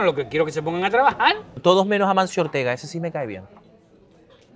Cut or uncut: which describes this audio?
cut